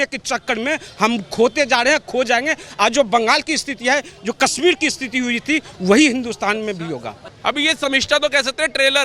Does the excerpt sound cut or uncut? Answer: cut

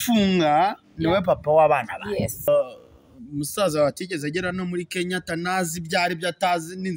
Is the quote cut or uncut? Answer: cut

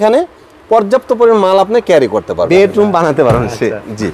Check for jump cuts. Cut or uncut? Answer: cut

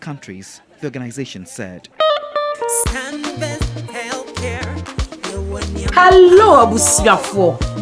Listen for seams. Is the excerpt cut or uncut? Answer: cut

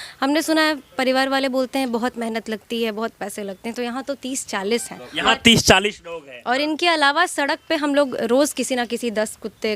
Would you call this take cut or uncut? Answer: uncut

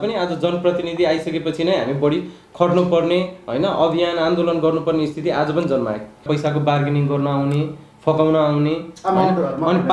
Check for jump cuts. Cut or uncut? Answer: cut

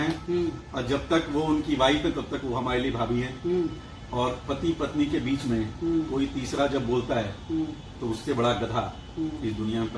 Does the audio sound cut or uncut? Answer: uncut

